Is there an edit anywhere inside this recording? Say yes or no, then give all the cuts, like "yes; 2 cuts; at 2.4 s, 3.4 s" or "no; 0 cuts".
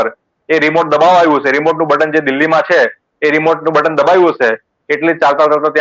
no; 0 cuts